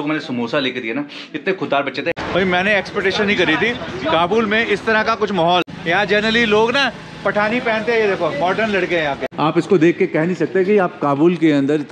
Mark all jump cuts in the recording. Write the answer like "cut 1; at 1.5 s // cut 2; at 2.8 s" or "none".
cut 1; at 2.2 s // cut 2; at 5.7 s // cut 3; at 9.3 s